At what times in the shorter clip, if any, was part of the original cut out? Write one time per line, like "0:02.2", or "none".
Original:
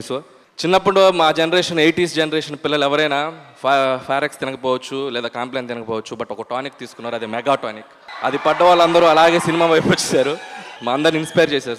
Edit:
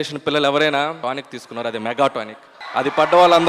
0:01.0